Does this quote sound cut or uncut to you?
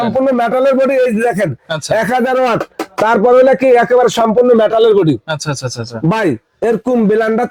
uncut